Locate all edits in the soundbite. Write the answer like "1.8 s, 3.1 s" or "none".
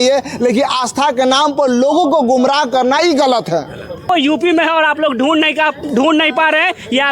4.0 s

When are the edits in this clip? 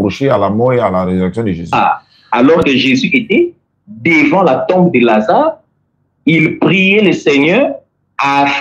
1.8 s

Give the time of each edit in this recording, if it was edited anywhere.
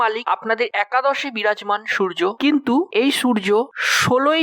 none

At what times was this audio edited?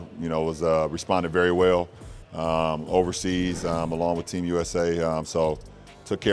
none

